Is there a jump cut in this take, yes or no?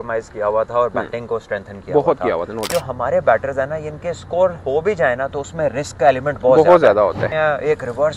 yes